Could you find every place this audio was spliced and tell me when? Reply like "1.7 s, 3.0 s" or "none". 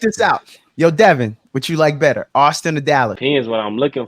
3.2 s